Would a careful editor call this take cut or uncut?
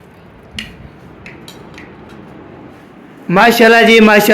cut